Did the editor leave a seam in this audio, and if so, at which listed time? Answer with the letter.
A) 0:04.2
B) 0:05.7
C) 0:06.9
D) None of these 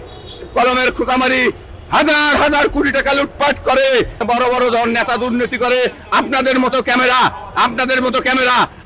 A